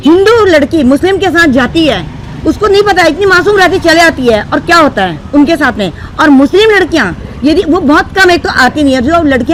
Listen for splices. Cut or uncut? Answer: uncut